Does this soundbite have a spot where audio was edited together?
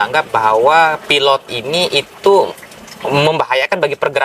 no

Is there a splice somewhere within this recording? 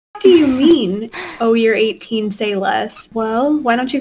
yes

